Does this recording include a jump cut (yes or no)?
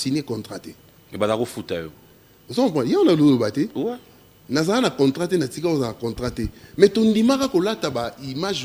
no